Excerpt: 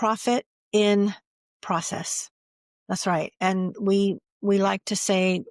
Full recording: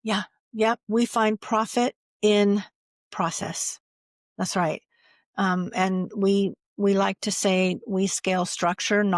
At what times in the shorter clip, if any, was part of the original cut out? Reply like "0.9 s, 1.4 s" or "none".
3.4 s